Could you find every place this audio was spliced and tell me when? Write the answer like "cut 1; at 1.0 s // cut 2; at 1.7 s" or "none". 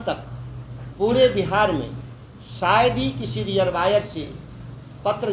none